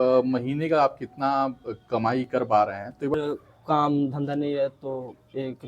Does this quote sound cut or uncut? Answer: cut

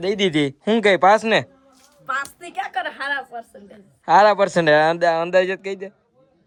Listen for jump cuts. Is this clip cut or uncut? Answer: uncut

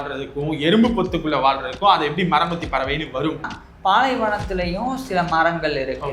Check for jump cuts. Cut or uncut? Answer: cut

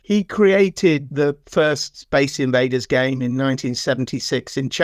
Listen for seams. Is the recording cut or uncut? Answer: uncut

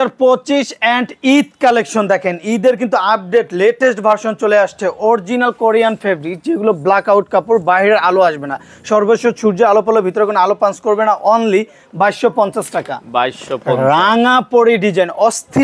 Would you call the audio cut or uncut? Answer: uncut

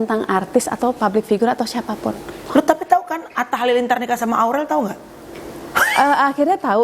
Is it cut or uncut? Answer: cut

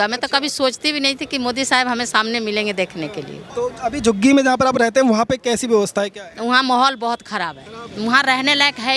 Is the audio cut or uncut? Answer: cut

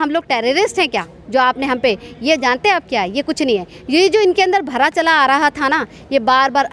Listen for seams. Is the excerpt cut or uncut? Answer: uncut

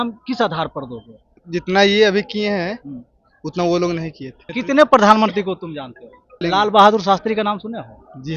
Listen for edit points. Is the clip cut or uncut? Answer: cut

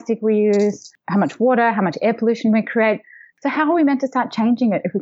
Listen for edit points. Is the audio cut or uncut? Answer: cut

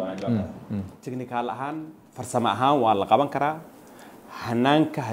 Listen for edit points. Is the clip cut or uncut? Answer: uncut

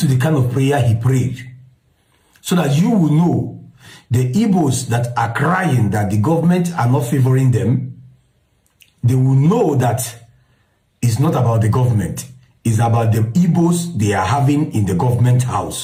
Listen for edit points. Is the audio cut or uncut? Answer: uncut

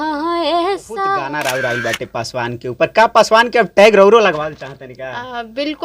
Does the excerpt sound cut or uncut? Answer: cut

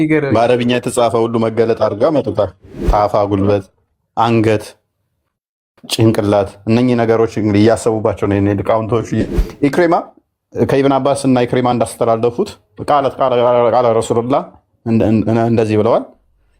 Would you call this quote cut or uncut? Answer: cut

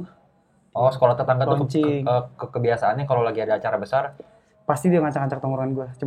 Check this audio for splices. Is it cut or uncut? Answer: uncut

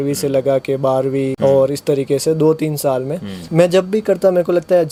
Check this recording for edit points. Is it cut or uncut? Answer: uncut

